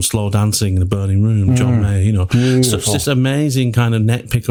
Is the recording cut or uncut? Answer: uncut